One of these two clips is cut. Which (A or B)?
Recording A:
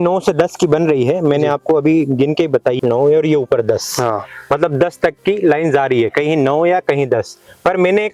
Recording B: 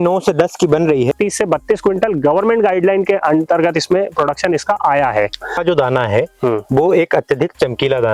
B